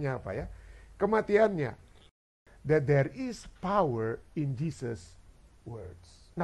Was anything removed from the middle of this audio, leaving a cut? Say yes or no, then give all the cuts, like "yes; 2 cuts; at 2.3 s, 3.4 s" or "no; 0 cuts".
yes; 1 cut; at 2.1 s